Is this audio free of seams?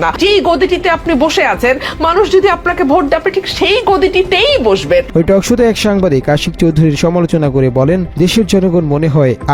yes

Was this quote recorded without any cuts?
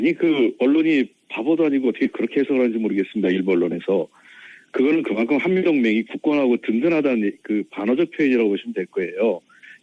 no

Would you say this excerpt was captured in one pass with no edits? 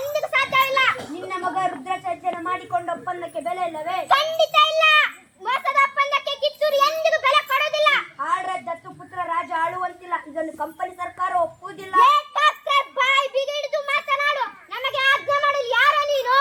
yes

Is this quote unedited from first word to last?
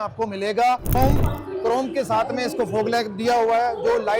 no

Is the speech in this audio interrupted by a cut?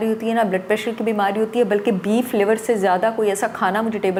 no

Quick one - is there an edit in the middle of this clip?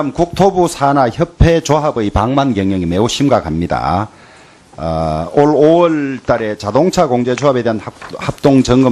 no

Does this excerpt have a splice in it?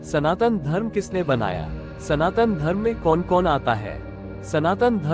no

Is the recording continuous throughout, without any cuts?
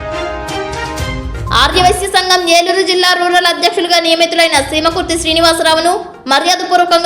no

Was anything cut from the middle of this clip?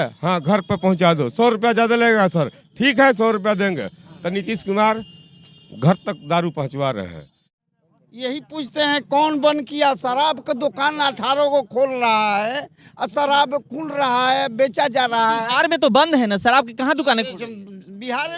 yes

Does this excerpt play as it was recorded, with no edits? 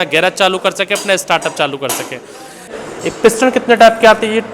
no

